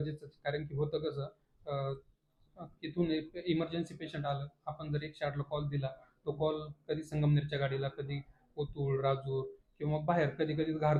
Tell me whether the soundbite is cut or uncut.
uncut